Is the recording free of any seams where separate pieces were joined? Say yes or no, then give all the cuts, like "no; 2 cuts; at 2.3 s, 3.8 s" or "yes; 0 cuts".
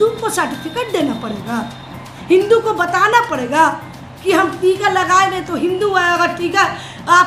yes; 0 cuts